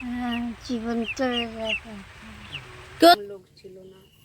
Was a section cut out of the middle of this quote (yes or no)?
yes